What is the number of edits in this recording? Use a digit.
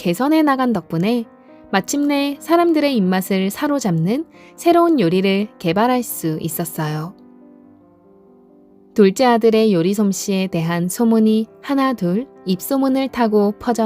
2